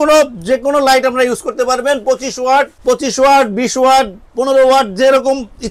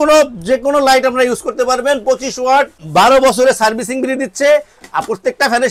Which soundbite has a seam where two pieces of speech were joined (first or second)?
second